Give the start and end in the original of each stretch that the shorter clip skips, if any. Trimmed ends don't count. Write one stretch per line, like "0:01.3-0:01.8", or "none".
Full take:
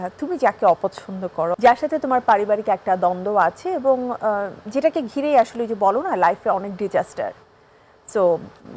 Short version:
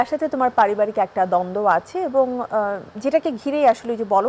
none